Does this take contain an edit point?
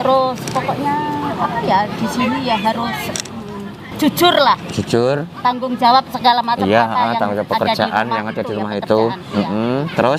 no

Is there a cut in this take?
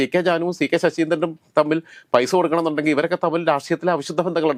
no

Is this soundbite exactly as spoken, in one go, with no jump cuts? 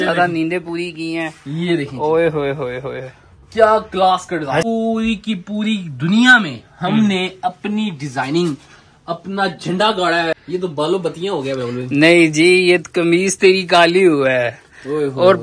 no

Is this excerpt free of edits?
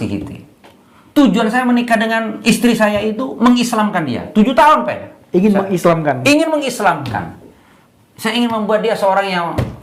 yes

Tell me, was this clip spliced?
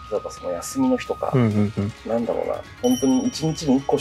no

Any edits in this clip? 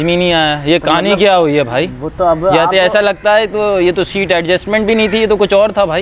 no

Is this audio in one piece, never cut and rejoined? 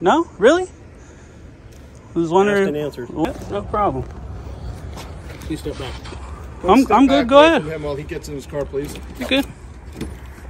no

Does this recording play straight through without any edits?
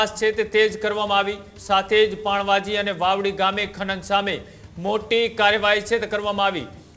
yes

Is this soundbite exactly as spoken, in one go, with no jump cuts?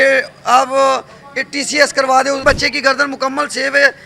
no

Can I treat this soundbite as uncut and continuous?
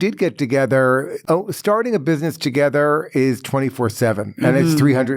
no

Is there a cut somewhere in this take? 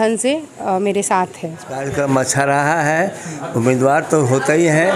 yes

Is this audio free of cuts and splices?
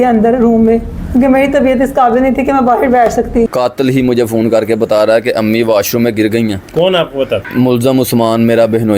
no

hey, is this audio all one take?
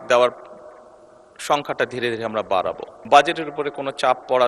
no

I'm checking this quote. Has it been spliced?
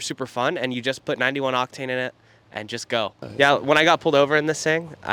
no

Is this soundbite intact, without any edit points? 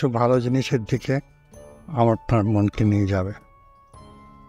yes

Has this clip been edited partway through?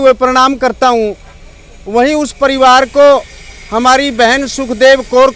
no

